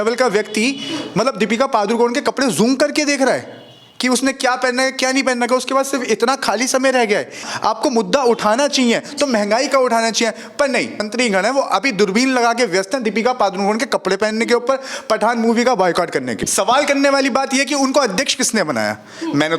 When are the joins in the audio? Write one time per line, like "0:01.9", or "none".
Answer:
0:07.5
0:11.1
0:16.3